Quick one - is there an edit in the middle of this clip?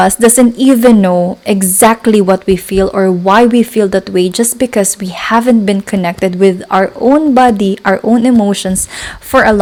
no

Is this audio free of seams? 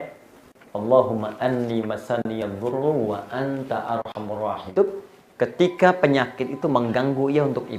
no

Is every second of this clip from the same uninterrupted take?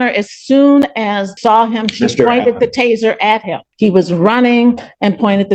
no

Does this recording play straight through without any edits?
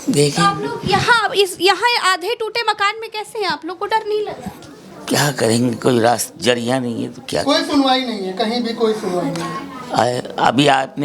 yes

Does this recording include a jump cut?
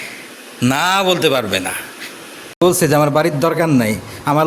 yes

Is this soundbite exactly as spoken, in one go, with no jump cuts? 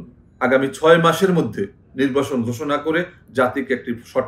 yes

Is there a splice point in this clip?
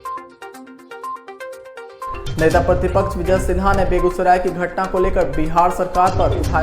yes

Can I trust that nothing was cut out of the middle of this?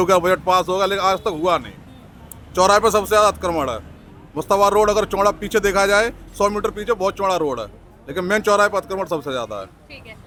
yes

